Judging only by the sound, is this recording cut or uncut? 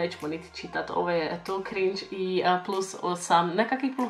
uncut